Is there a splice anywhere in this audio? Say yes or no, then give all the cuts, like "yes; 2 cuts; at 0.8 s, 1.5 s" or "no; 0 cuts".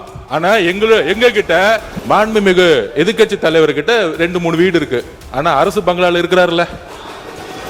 yes; 1 cut; at 1.9 s